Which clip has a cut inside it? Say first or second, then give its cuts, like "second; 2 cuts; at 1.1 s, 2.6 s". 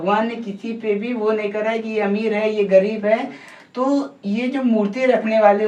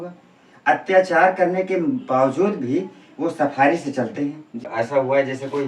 second; 1 cut; at 4.7 s